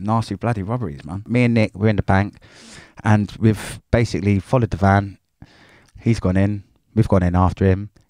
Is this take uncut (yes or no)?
no